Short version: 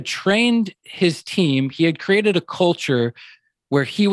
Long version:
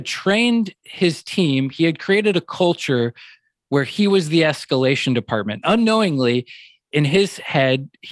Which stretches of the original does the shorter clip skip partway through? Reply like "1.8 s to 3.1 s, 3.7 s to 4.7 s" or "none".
none